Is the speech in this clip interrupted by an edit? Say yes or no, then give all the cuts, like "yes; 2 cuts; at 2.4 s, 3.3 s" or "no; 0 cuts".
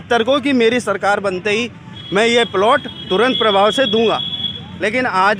no; 0 cuts